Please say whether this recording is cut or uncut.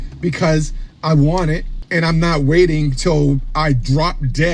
cut